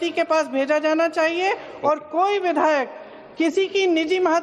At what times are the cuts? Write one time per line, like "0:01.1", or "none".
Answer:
0:01.1